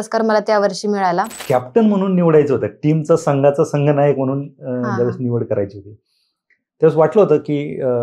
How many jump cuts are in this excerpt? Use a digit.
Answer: 1